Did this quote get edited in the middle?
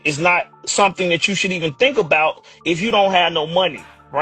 no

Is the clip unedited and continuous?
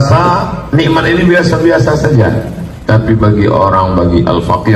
yes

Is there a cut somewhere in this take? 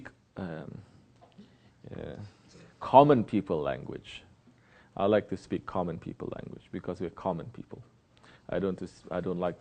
yes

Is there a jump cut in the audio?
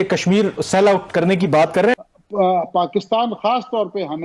yes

